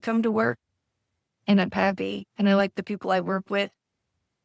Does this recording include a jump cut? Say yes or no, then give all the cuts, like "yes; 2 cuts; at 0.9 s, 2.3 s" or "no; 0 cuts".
no; 0 cuts